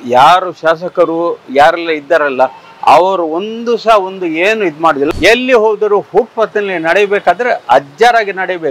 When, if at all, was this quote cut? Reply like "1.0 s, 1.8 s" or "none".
5.1 s